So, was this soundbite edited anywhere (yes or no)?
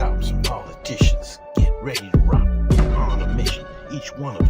no